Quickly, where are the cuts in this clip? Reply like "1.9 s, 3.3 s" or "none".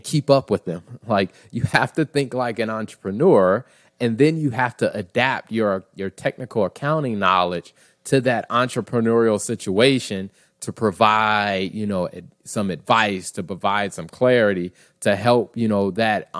none